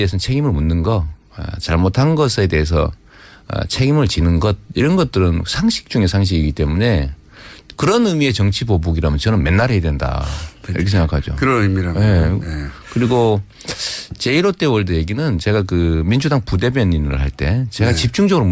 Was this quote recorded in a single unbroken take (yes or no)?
yes